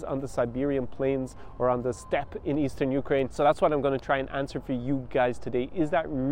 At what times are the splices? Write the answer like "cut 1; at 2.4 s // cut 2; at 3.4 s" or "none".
cut 1; at 3.3 s